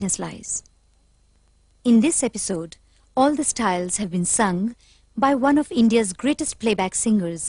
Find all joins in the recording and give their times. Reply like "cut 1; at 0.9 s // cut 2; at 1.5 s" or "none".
cut 1; at 5.9 s

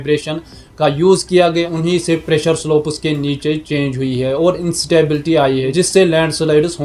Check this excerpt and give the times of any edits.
none

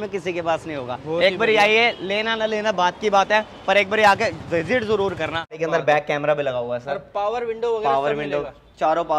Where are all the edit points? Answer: cut 1; at 5.6 s

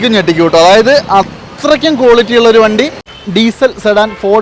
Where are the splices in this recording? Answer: cut 1; at 3.1 s

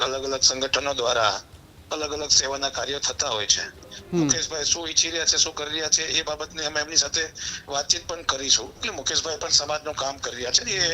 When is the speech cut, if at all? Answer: cut 1; at 8.8 s

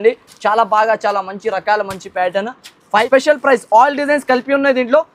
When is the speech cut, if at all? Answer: cut 1; at 3.1 s

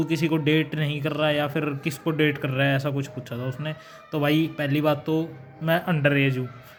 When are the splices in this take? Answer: none

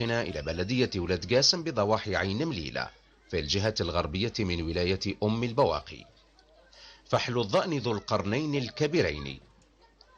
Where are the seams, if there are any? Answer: cut 1; at 1.1 s

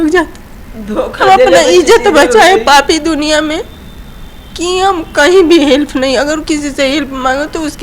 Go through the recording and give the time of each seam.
none

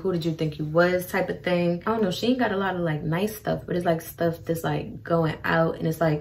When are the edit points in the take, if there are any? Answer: cut 1; at 1.8 s

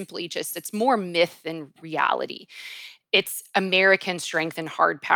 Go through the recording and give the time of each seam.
cut 1; at 1.7 s

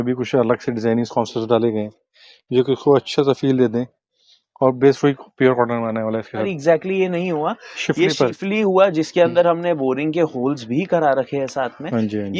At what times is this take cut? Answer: cut 1; at 6.4 s

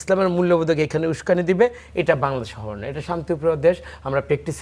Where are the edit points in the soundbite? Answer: none

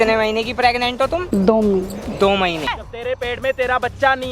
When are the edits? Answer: cut 1; at 1.1 s // cut 2; at 3.2 s

